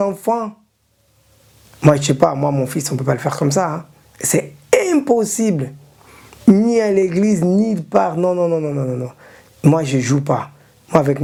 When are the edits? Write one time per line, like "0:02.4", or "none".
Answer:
none